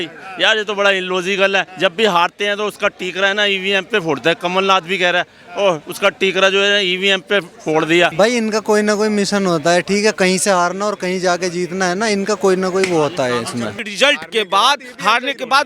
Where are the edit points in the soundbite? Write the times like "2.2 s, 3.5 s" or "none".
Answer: 1.7 s, 8.1 s, 13.8 s